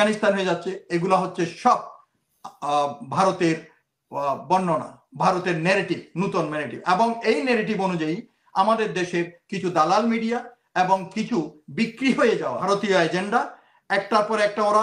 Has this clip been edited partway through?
yes; 1 cut; at 12.6 s

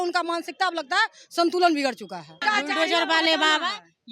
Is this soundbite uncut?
no; 1 cut; at 2.4 s

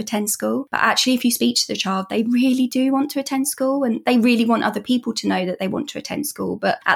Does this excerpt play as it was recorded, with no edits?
yes; 0 cuts

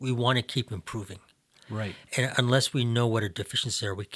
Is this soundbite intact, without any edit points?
yes; 0 cuts

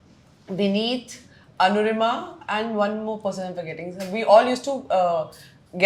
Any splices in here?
no; 0 cuts

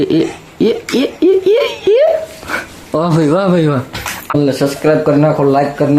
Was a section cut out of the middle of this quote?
yes; 1 cut; at 4.3 s

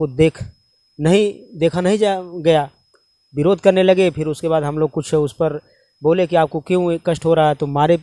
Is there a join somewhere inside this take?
no; 0 cuts

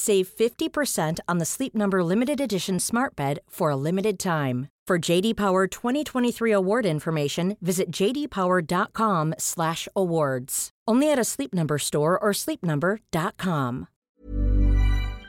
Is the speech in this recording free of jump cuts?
no; 1 cut; at 13.9 s

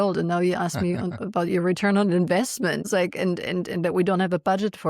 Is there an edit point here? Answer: yes; 1 cut; at 2.9 s

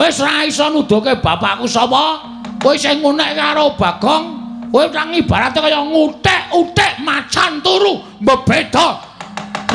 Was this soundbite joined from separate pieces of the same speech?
no; 0 cuts

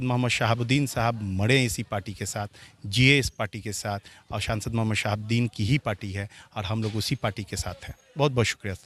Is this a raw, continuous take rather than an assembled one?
yes; 0 cuts

